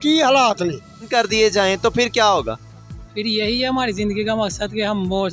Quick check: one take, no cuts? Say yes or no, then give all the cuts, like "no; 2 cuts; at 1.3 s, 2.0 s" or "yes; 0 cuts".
no; 1 cut; at 1.1 s